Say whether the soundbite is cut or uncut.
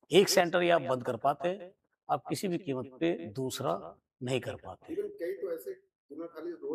uncut